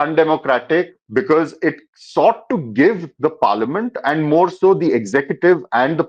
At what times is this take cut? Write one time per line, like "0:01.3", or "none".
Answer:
0:01.0